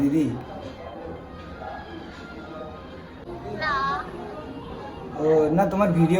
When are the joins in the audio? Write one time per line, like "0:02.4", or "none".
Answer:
0:03.2